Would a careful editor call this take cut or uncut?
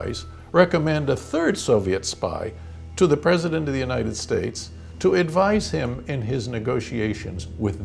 uncut